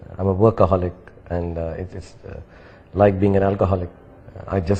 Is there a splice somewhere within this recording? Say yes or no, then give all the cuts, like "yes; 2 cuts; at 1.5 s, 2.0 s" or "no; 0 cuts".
no; 0 cuts